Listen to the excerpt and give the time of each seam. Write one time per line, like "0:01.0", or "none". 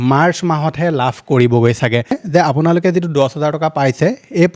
0:02.2